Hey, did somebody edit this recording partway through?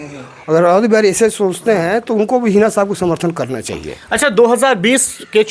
no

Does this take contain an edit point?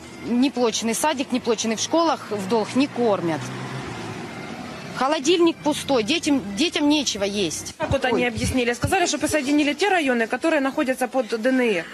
no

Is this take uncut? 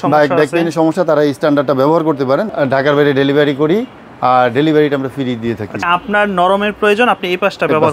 no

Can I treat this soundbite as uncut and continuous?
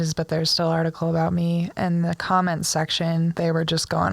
no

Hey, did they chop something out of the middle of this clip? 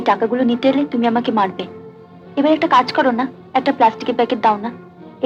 no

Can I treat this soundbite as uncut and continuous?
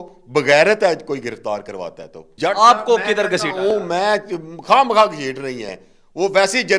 no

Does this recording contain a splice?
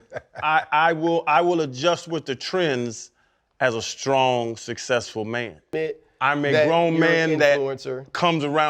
yes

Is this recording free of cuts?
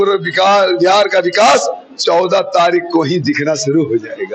yes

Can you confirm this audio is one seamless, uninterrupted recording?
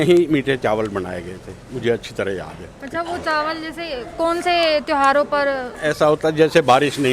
yes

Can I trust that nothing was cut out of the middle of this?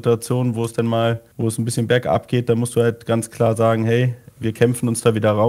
yes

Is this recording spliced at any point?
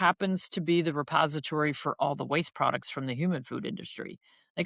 no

